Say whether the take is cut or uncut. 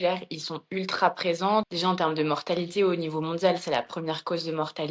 cut